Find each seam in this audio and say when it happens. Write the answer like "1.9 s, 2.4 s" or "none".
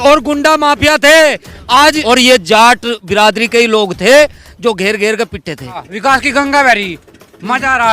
2.0 s, 5.9 s